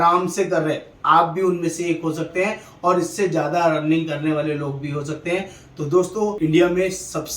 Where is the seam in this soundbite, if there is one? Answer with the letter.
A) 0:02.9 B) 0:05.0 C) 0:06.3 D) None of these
C